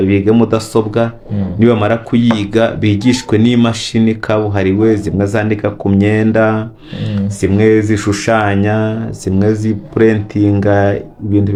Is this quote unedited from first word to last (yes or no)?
yes